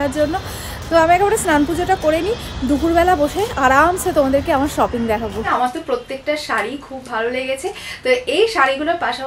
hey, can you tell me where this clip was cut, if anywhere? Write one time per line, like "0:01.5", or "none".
0:05.4